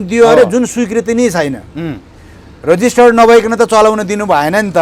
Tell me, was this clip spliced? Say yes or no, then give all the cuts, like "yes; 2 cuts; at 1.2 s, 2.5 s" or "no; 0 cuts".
no; 0 cuts